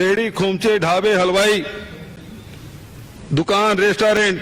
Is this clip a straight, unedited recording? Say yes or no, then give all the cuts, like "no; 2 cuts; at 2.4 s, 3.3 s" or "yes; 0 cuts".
yes; 0 cuts